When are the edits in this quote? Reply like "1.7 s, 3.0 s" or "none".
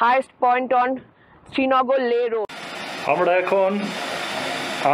2.5 s